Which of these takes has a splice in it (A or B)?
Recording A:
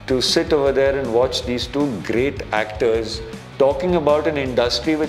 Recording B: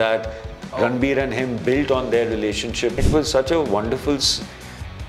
B